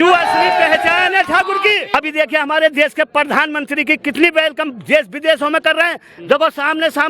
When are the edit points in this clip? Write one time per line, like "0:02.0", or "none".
0:01.8